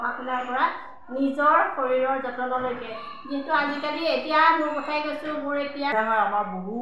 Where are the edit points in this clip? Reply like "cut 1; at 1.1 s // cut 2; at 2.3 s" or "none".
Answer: cut 1; at 5.9 s